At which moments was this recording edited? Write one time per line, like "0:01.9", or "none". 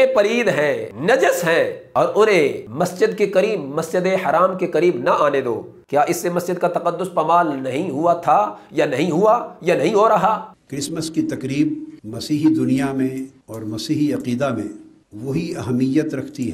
0:00.9
0:01.8
0:02.6
0:05.7
0:10.5